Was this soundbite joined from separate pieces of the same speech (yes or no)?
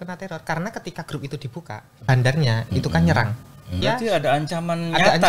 yes